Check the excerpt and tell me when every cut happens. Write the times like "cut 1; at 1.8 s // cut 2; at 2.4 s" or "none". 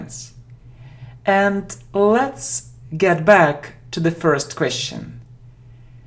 none